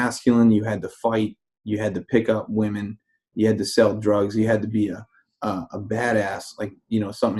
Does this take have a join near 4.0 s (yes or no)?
no